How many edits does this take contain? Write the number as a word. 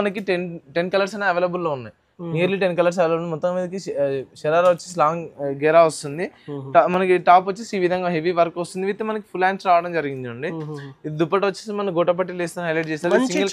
zero